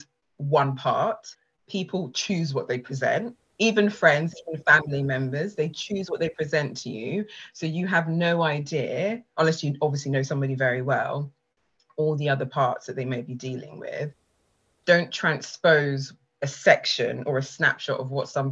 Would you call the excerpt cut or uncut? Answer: uncut